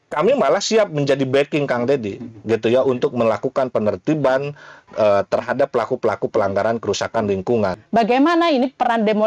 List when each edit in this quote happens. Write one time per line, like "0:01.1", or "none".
0:07.8